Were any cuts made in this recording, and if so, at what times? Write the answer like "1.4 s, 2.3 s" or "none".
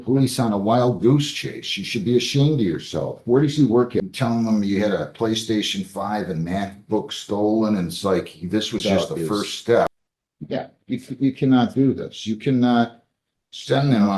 4.0 s, 9.9 s